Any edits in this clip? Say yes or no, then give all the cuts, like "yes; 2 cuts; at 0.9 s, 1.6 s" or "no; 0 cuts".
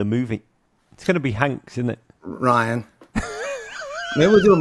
yes; 1 cut; at 3.0 s